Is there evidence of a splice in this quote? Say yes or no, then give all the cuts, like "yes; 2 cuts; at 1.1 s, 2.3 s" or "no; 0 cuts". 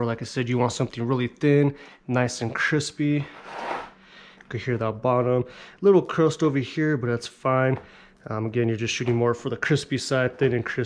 no; 0 cuts